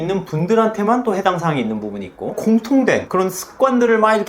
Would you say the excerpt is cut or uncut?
cut